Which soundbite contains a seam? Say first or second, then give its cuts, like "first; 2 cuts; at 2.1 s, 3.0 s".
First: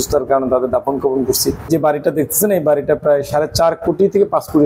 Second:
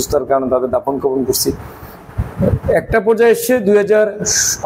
first; 1 cut; at 1.7 s